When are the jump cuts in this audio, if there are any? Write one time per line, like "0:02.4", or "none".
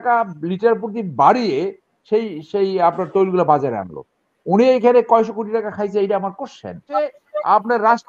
0:06.8